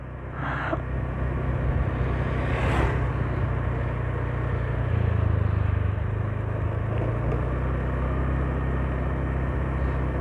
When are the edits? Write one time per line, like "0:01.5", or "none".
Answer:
none